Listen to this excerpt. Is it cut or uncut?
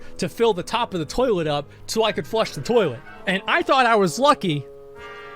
cut